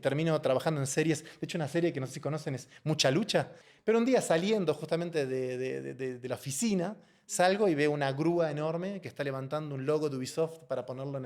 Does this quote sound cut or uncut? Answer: cut